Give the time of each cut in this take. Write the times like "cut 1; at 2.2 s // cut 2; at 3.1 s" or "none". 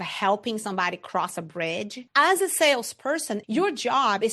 cut 1; at 2.0 s // cut 2; at 3.4 s